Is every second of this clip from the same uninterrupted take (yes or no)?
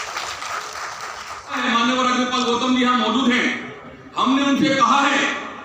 no